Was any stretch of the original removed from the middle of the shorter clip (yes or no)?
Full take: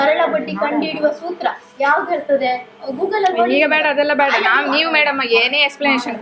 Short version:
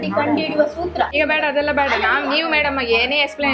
yes